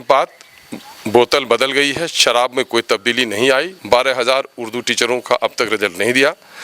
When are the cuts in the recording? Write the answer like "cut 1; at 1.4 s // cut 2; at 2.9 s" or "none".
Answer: cut 1; at 3.8 s

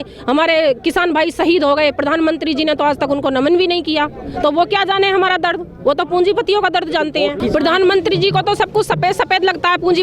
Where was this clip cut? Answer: cut 1; at 7.4 s

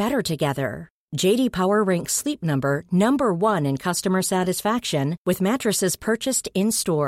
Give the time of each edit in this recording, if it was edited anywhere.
none

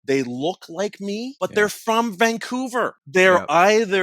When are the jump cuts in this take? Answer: cut 1; at 1.3 s // cut 2; at 3.0 s

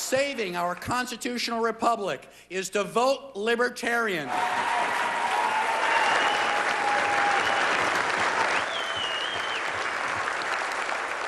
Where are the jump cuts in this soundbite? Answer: cut 1; at 4.3 s

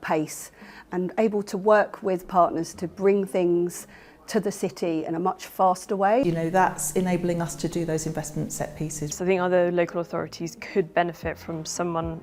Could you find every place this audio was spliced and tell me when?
cut 1; at 6.2 s // cut 2; at 9.1 s

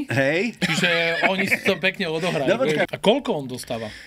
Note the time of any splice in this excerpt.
cut 1; at 2.9 s

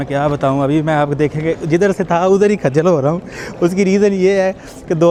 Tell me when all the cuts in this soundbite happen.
none

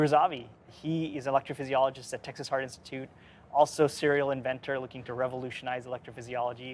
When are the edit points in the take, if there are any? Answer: none

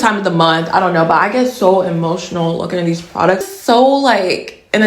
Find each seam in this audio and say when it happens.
cut 1; at 3.5 s

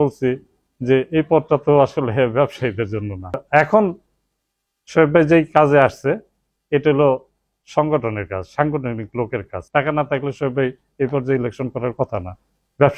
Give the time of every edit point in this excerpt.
cut 1; at 3.4 s // cut 2; at 9.6 s

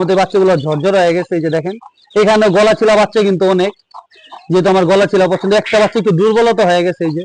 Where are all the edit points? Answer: none

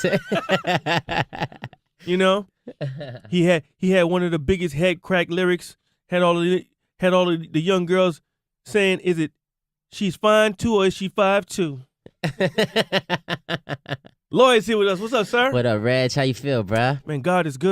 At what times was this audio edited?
cut 1; at 14.7 s

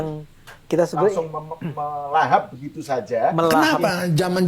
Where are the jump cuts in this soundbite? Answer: cut 1; at 3.5 s

